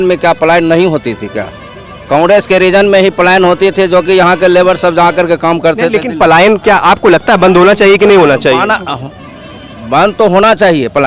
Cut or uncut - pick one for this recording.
uncut